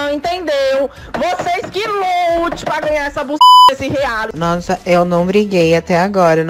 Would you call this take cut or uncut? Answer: cut